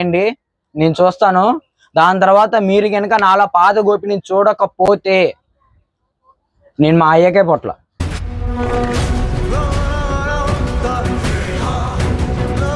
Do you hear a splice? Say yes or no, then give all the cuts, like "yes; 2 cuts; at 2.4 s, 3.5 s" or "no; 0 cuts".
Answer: no; 0 cuts